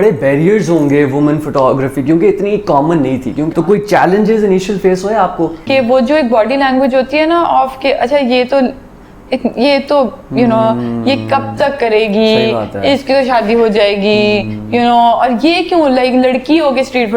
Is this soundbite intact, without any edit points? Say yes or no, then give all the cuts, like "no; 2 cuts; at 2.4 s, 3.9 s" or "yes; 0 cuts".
no; 2 cuts; at 3.5 s, 5.6 s